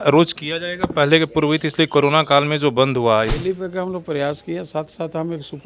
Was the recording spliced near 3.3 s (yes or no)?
yes